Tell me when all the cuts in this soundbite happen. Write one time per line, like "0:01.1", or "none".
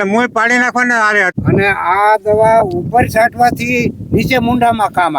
0:01.3

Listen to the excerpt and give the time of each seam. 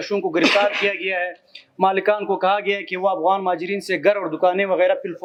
none

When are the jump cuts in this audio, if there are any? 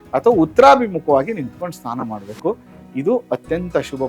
none

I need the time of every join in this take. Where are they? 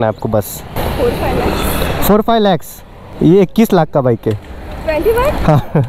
0:00.8
0:03.0

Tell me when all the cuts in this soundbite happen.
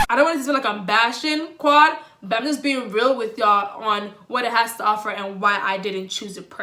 none

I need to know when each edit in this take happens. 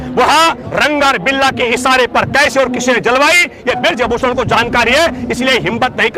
none

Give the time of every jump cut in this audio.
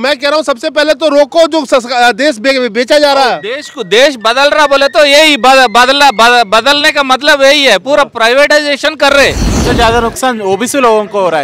0:09.6

